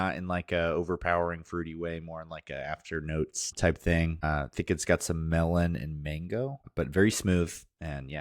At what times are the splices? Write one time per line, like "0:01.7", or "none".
0:03.5
0:04.2
0:06.6